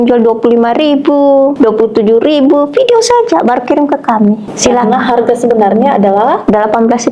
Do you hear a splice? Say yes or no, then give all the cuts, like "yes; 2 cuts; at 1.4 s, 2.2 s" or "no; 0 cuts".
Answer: yes; 2 cuts; at 1.5 s, 4.5 s